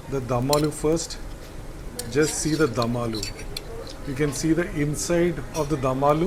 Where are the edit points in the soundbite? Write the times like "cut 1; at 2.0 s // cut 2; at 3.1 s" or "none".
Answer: none